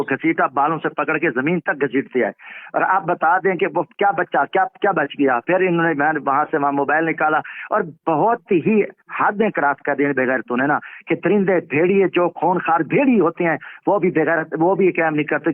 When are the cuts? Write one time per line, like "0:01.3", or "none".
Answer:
none